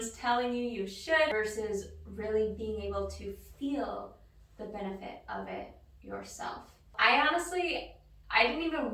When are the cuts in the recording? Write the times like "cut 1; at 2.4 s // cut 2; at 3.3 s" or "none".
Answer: cut 1; at 1.3 s // cut 2; at 6.9 s